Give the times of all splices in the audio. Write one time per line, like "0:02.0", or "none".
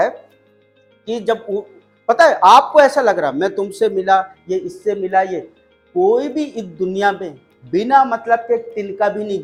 none